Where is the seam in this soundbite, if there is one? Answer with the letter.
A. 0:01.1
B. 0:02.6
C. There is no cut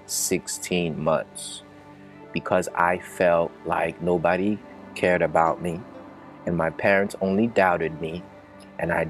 C